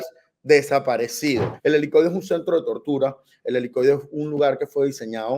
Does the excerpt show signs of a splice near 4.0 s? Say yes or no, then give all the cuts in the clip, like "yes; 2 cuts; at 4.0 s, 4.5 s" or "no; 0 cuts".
no; 1 cut; at 1.5 s